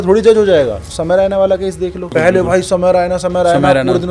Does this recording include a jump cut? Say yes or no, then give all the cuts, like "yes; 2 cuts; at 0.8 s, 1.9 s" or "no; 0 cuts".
yes; 2 cuts; at 0.8 s, 2.1 s